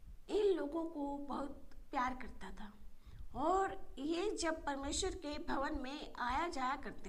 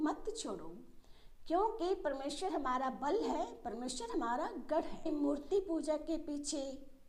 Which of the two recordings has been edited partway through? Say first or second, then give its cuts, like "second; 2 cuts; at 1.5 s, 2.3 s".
second; 1 cut; at 5.1 s